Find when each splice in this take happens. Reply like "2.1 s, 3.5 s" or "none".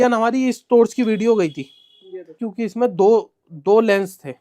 2.4 s